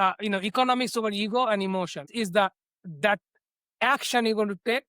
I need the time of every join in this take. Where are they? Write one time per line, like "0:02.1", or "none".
0:02.1